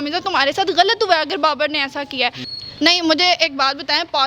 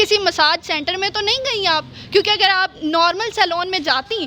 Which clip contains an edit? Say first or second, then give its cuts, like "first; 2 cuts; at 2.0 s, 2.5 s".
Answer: first; 1 cut; at 2.4 s